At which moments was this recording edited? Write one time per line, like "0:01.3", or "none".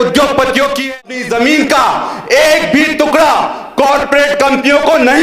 0:01.1